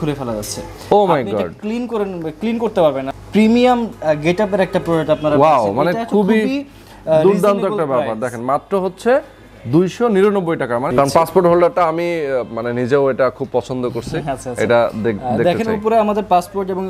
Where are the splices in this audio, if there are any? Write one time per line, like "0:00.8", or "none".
0:03.1
0:10.9